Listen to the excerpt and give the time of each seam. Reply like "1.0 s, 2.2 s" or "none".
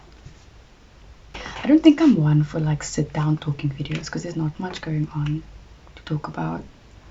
1.3 s